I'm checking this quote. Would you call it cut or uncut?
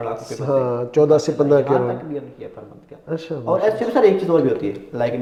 uncut